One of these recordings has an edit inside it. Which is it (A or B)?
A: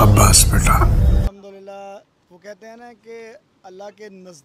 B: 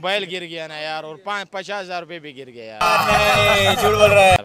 A